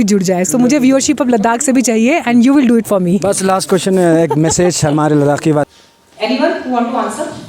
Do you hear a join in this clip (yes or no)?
yes